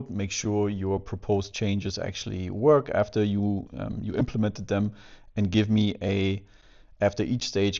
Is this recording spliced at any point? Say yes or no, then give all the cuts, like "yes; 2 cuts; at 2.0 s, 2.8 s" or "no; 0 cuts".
no; 0 cuts